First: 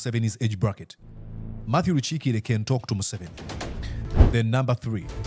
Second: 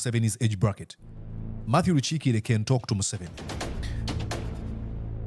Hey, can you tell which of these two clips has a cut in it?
first; 1 cut; at 4.0 s

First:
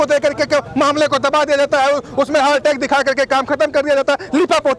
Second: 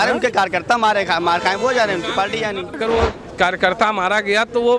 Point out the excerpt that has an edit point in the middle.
second; 1 cut; at 2.7 s

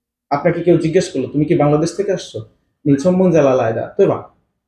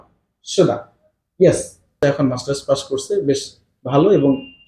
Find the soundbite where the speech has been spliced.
second; 1 cut; at 2.0 s

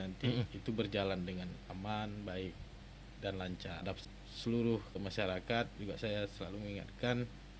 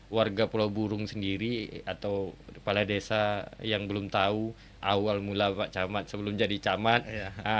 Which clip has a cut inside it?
first; 2 cuts; at 3.9 s, 5.0 s

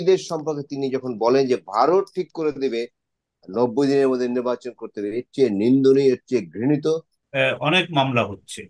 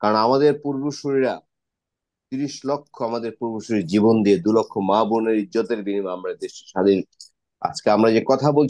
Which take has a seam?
first; 1 cut; at 7.2 s

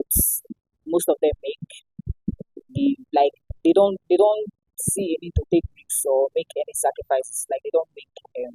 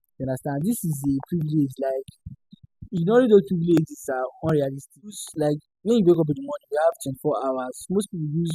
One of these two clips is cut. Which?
second; 1 cut; at 5.2 s

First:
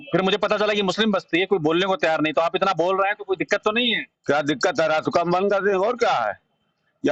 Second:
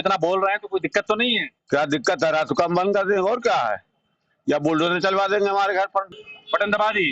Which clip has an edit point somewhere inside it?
second; 1 cut; at 6.2 s

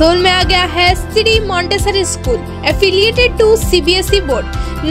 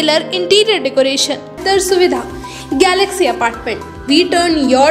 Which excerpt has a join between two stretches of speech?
second; 1 cut; at 1.6 s

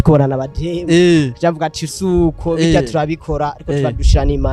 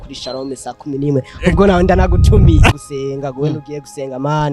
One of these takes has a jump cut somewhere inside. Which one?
second; 1 cut; at 2.7 s

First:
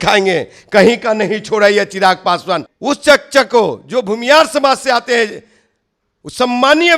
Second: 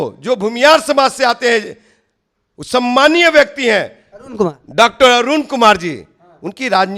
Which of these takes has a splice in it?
first; 1 cut; at 2.7 s

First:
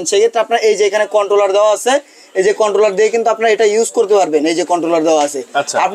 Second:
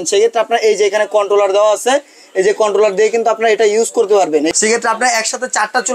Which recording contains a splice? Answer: second; 1 cut; at 4.5 s

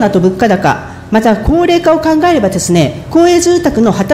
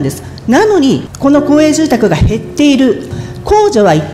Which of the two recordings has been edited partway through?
second; 2 cuts; at 1.1 s, 3.1 s

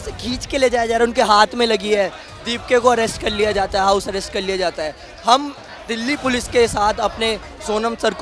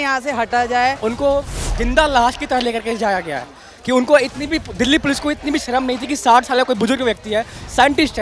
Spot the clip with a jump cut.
second; 1 cut; at 1.0 s

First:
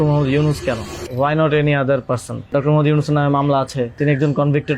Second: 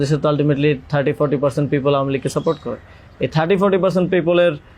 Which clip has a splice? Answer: first; 3 cuts; at 1.0 s, 2.5 s, 4.0 s

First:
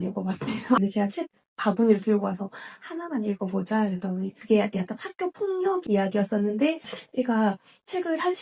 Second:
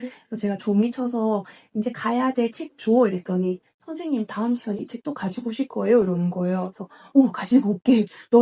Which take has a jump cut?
first; 3 cuts; at 0.8 s, 4.3 s, 6.9 s

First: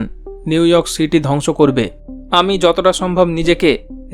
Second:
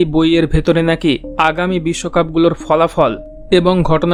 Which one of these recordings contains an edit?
first; 1 cut; at 2.1 s

